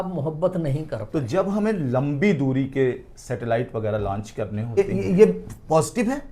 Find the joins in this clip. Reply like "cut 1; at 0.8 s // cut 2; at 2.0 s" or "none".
cut 1; at 1.0 s // cut 2; at 4.8 s